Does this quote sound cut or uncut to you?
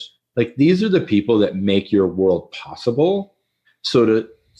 uncut